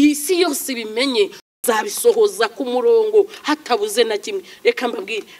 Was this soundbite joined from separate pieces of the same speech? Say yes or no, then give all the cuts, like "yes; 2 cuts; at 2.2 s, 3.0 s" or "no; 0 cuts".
yes; 1 cut; at 1.4 s